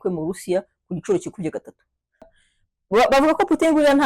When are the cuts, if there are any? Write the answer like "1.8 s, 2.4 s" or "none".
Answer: 2.3 s